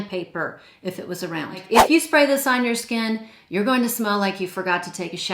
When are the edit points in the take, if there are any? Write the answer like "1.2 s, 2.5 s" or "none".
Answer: 1.9 s